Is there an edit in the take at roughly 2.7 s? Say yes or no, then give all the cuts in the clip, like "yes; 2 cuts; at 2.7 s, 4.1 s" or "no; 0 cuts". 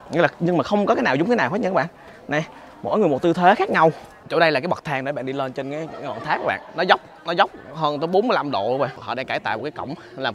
no; 2 cuts; at 4.1 s, 9.1 s